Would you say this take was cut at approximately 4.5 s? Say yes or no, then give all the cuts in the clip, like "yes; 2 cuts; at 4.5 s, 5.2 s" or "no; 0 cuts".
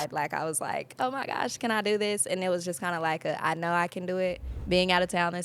yes; 1 cut; at 4.5 s